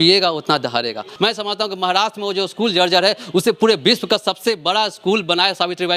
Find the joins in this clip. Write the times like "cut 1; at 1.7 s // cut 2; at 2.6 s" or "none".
cut 1; at 1.1 s